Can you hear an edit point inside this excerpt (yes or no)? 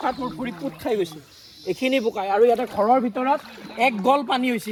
no